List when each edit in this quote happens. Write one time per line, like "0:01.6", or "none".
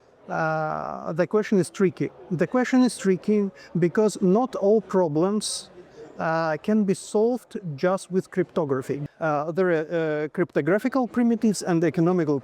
0:09.0

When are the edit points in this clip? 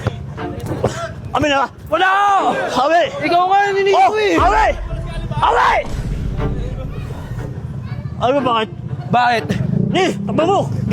none

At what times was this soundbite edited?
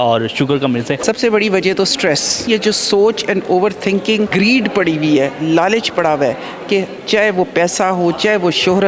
0:00.9
0:02.5
0:04.3

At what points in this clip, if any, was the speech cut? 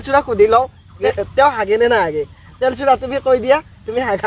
0:01.0

